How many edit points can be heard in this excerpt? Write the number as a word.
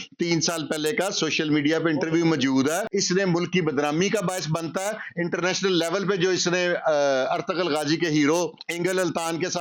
one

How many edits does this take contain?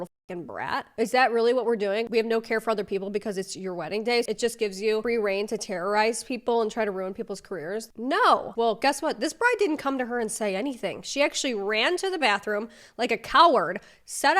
three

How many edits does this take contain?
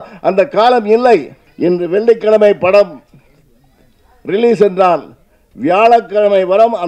one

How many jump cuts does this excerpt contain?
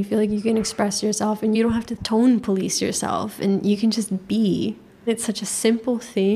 two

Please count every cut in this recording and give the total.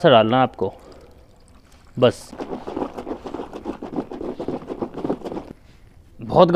two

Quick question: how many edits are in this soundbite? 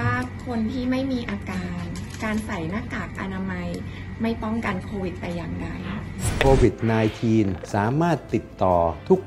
one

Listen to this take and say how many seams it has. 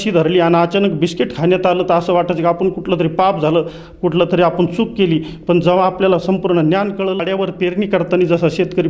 one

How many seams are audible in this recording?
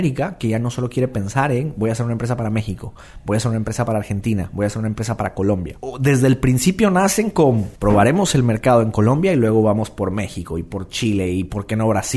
two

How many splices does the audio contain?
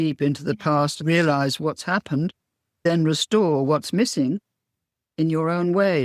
two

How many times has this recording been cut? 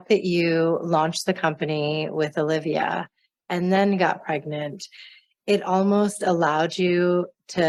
zero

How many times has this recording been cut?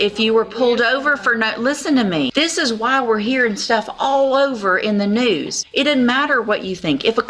two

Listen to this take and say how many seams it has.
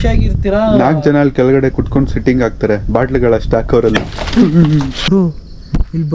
one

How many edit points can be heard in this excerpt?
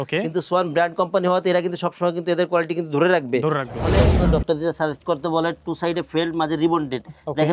one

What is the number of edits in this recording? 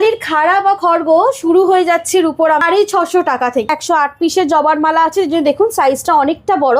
two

